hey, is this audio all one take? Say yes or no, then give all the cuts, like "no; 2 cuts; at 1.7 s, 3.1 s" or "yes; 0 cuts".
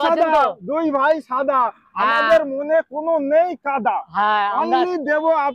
yes; 0 cuts